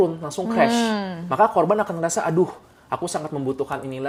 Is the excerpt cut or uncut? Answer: uncut